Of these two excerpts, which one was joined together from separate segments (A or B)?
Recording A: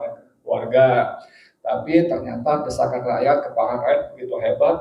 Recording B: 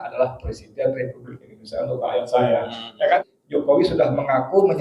B